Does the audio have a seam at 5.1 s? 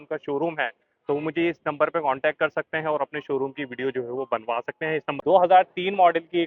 yes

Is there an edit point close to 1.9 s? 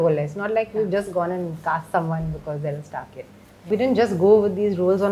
no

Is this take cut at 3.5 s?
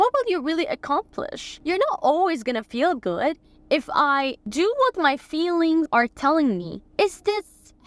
yes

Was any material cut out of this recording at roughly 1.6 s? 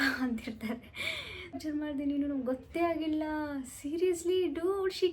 yes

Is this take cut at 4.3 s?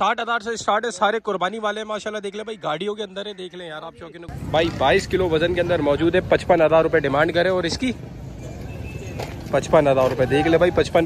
yes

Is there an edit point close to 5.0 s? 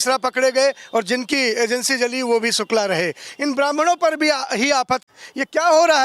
yes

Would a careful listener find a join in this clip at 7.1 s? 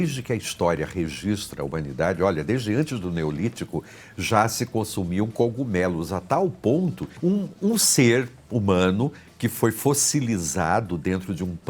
yes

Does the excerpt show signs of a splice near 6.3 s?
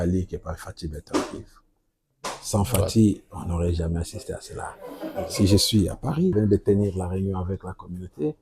yes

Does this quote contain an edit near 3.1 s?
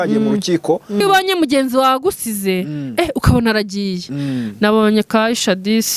no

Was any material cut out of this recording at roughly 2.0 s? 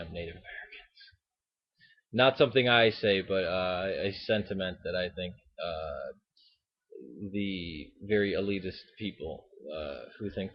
no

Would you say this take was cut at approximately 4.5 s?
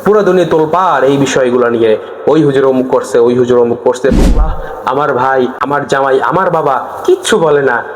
yes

